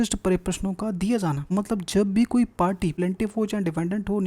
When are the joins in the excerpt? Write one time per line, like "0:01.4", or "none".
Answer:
0:01.4
0:02.9